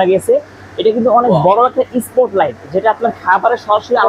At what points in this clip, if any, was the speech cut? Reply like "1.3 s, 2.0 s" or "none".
none